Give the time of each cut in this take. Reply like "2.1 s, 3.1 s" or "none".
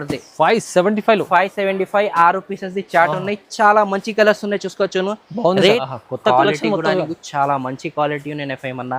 5.8 s